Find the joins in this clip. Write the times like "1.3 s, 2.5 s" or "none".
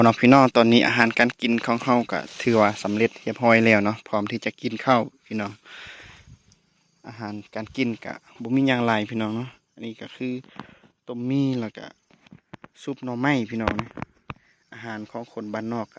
none